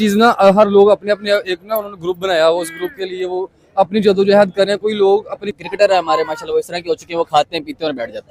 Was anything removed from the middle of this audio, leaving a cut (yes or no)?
yes